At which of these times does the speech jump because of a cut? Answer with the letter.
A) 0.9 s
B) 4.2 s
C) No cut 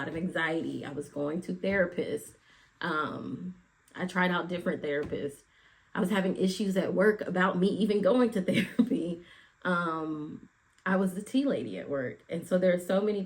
C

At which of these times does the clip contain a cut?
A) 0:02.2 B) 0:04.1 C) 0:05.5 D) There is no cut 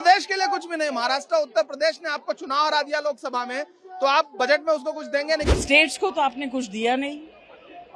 C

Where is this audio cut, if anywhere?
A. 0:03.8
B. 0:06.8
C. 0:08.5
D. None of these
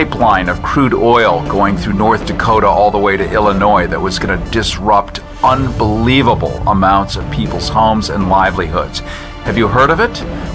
D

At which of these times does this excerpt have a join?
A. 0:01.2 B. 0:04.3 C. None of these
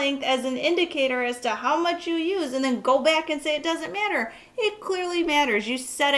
C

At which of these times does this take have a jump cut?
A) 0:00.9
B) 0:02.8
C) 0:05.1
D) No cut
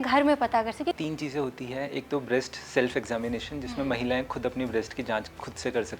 A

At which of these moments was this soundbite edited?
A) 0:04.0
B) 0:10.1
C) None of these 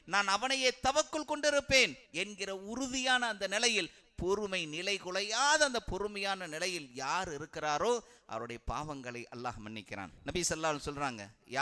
B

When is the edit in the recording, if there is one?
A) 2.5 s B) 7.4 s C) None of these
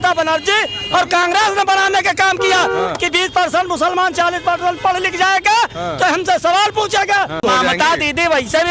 B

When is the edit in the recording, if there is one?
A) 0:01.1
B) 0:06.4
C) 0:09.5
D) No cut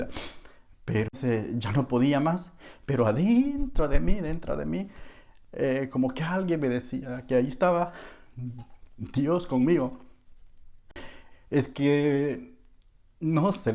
A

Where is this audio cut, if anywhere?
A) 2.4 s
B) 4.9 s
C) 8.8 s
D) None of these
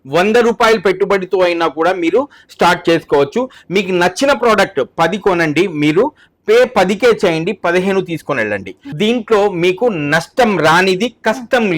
C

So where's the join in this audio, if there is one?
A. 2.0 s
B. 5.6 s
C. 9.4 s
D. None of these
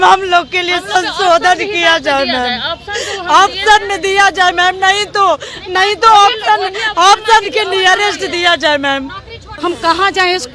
C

